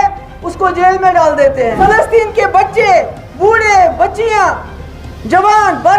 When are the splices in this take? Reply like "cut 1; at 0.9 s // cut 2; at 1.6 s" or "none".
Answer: cut 1; at 1.8 s